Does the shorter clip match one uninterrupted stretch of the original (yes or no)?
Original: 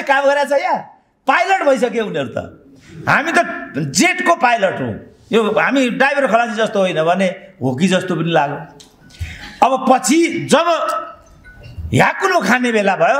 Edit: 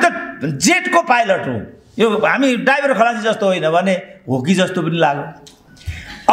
yes